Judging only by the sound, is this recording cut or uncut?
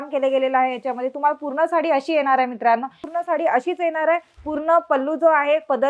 cut